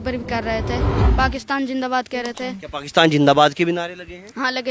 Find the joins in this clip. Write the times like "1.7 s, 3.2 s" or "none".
1.0 s